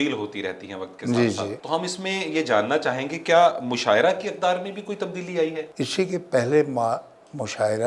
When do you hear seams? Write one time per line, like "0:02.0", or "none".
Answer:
0:01.6
0:05.7

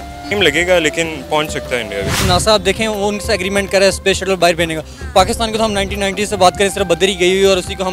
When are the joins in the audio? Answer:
none

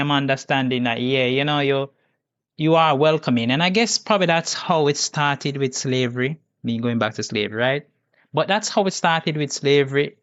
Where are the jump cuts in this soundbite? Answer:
none

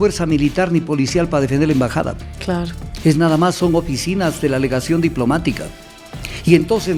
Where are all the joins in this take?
none

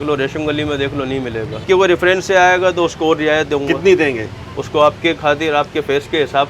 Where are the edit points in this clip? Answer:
0:01.6

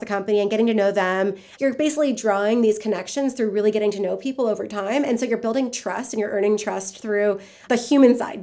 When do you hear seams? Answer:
0:01.5

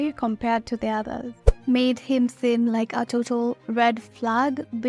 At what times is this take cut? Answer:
0:01.2

